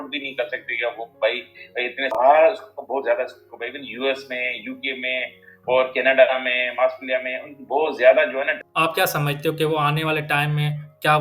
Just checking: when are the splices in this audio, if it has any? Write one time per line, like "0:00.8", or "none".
0:02.1
0:08.6